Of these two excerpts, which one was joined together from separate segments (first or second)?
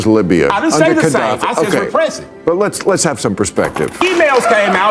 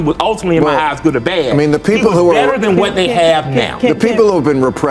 first